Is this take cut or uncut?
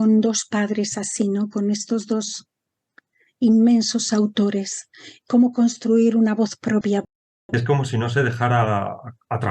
cut